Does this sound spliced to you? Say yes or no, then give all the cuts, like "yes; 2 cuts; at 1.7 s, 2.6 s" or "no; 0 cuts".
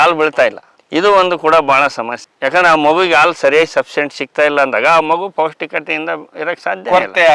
no; 0 cuts